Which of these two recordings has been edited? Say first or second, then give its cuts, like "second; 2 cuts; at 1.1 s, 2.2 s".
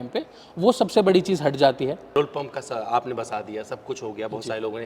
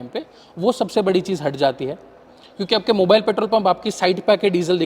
first; 1 cut; at 2.0 s